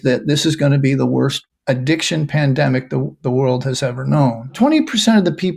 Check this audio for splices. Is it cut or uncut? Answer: cut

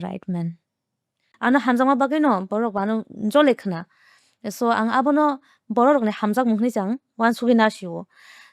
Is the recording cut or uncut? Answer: cut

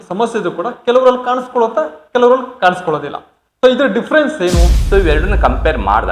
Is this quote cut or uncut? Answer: cut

